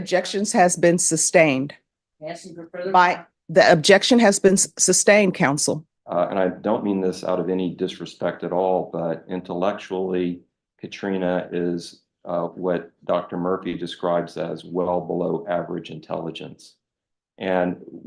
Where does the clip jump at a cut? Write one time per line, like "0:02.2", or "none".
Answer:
0:05.9